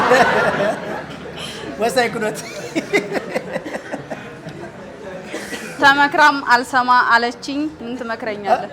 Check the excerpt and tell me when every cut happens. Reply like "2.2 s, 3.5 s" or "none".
7.8 s